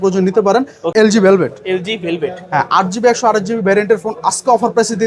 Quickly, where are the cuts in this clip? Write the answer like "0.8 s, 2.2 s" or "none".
0.9 s